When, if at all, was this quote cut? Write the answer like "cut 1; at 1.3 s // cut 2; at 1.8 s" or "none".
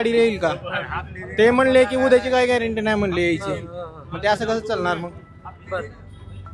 none